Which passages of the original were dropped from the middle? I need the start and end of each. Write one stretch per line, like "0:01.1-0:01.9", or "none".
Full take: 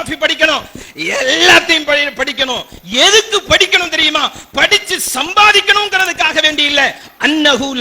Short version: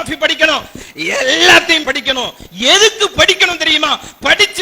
0:01.8-0:02.1